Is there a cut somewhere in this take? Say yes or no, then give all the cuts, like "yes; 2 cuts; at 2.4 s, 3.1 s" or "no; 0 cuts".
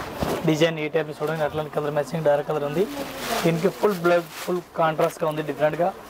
no; 0 cuts